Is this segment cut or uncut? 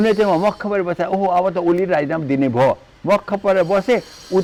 uncut